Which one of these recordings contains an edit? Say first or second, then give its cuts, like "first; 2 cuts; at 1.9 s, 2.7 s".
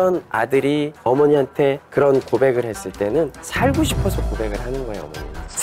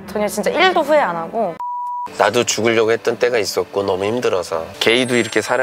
second; 1 cut; at 1.7 s